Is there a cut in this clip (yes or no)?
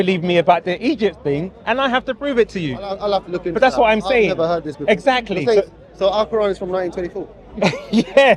no